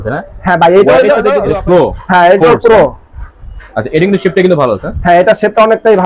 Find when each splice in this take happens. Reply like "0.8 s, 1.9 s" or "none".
1.4 s